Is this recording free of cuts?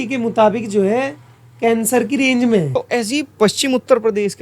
no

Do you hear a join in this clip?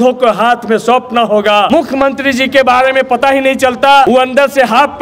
yes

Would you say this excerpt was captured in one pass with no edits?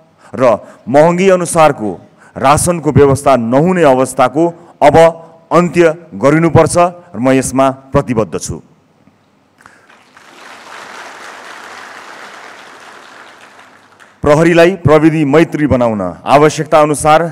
yes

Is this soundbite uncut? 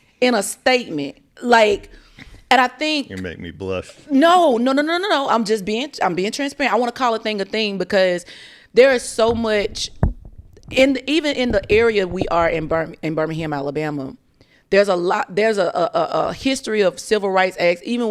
yes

